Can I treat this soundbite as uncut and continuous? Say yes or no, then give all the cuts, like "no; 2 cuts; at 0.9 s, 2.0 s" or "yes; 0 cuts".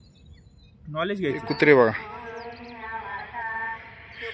no; 1 cut; at 1.5 s